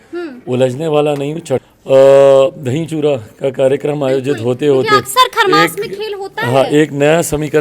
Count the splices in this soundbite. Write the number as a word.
one